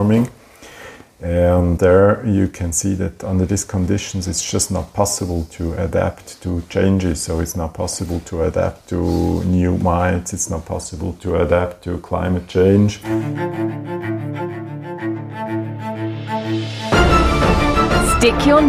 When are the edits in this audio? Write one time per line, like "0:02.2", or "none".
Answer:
0:13.0